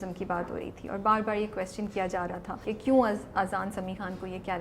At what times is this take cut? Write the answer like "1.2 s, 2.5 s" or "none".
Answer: 2.7 s